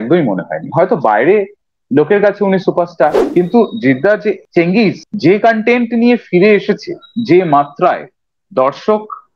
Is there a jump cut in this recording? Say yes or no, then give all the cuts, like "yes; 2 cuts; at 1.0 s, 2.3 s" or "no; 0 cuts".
yes; 1 cut; at 3.2 s